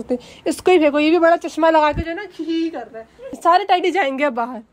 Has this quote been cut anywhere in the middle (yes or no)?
yes